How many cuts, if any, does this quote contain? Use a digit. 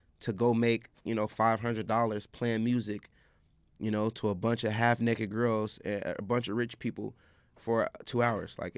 0